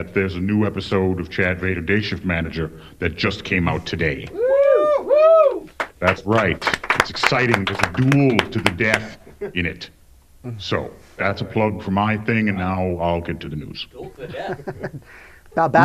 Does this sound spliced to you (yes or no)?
no